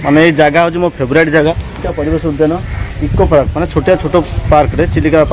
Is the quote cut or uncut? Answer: cut